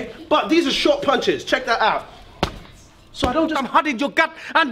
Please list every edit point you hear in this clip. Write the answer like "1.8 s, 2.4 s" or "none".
3.6 s